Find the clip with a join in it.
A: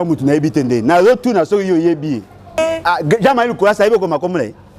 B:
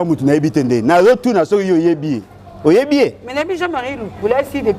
A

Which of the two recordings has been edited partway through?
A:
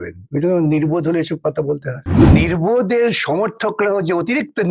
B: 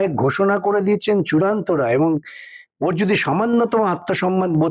A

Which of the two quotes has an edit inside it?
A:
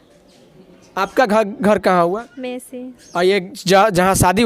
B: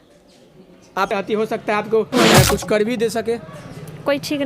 B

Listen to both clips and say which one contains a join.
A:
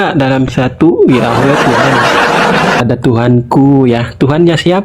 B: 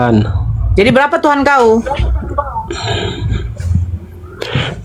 A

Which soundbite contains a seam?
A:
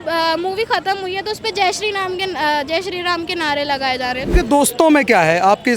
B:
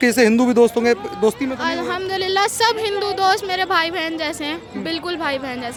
A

